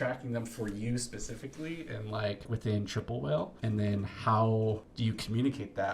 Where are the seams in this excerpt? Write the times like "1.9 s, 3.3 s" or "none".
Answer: 2.5 s, 3.6 s, 4.9 s